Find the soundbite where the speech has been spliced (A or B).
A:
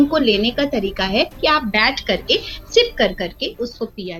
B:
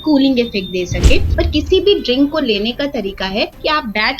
B